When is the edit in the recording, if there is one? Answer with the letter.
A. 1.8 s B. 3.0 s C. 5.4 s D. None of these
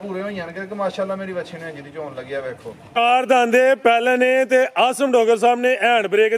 B